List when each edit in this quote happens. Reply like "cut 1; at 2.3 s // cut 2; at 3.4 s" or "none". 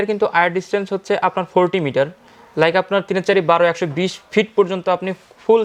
none